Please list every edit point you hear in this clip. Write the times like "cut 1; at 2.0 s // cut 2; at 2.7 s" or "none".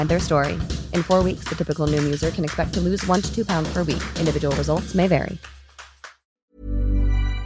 cut 1; at 6.3 s